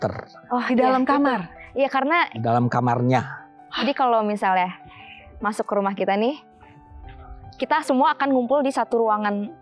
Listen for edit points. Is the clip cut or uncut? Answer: uncut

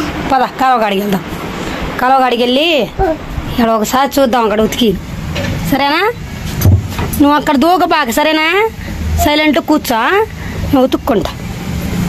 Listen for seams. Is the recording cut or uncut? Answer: uncut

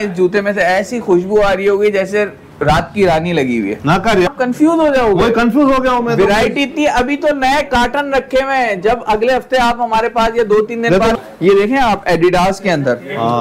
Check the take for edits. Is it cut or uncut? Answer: cut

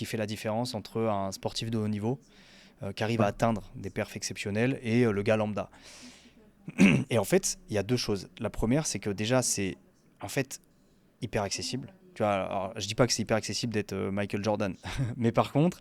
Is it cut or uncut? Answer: uncut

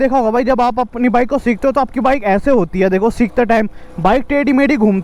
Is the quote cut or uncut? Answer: uncut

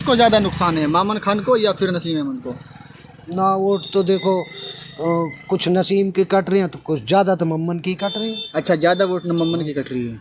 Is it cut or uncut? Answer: uncut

